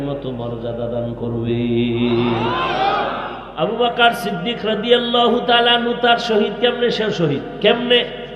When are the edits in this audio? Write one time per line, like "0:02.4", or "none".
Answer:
0:03.4